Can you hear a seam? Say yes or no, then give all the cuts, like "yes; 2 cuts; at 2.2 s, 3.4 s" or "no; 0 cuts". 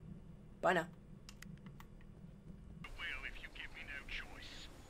yes; 1 cut; at 2.8 s